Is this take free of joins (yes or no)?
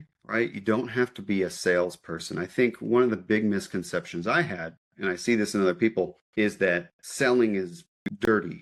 yes